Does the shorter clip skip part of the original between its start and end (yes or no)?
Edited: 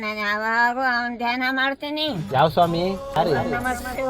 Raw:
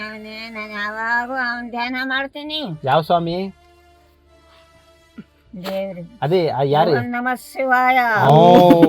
yes